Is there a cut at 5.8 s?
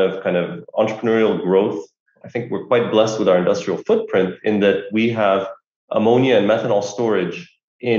no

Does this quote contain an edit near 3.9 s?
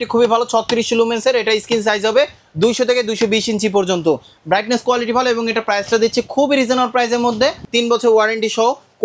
no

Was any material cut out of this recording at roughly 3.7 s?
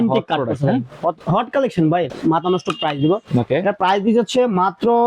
no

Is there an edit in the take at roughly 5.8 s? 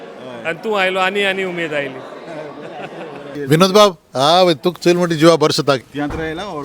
yes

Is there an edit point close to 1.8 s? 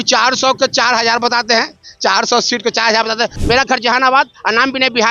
no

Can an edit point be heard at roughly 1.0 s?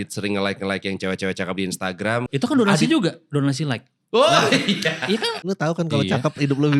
no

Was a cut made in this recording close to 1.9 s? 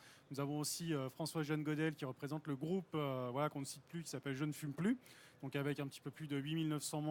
no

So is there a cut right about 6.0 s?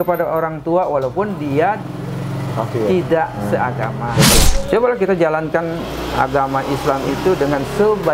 no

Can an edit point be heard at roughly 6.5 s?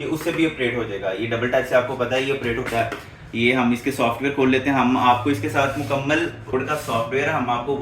yes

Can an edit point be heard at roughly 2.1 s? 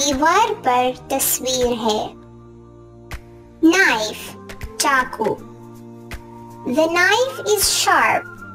yes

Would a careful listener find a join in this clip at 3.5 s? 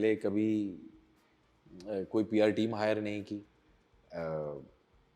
no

